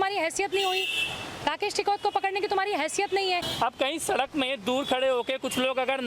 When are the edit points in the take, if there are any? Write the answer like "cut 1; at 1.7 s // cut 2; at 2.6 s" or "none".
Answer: cut 1; at 3.5 s